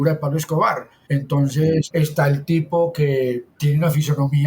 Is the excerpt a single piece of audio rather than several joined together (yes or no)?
no